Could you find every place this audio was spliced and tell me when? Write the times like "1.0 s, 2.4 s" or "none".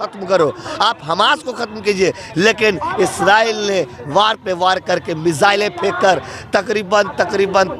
none